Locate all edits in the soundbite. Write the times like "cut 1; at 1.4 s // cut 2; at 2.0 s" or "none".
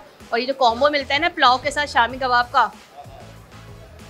none